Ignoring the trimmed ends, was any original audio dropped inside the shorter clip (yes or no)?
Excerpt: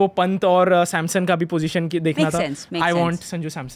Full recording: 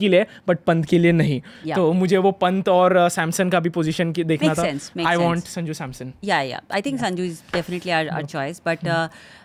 no